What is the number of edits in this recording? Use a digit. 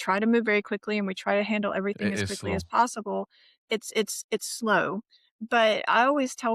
0